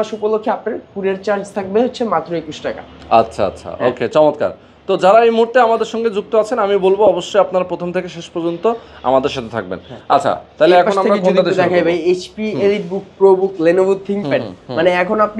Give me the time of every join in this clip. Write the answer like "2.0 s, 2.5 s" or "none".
none